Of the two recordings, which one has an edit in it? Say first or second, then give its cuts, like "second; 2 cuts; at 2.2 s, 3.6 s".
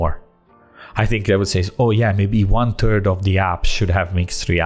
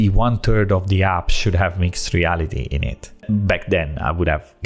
second; 1 cut; at 3.2 s